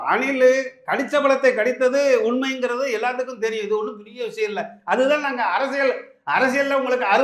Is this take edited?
no; 0 cuts

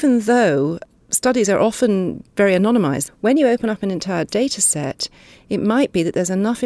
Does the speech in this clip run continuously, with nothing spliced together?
no; 1 cut; at 3.1 s

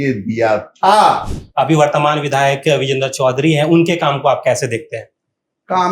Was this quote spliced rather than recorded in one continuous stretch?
yes; 1 cut; at 1.4 s

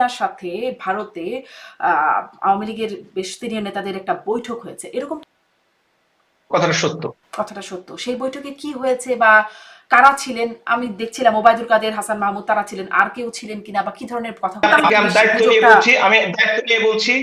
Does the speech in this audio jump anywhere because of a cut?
yes; 2 cuts; at 5.2 s, 14.6 s

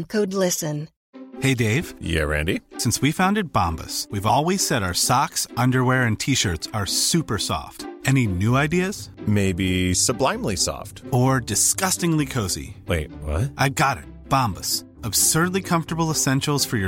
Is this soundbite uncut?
no; 1 cut; at 1.0 s

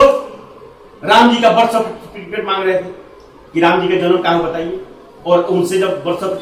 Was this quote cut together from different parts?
no; 0 cuts

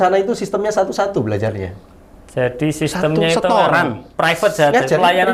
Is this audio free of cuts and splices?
yes; 0 cuts

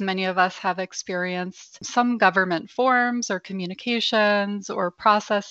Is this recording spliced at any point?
yes; 1 cut; at 1.8 s

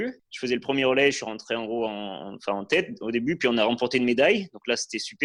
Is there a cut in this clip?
no; 0 cuts

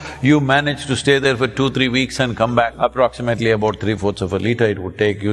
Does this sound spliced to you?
yes; 1 cut; at 2.7 s

